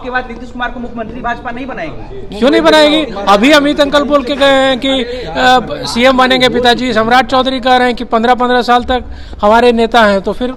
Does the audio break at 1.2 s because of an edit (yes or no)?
no